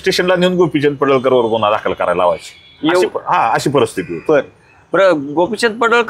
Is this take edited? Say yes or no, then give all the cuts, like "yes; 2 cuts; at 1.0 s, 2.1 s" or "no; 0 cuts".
no; 0 cuts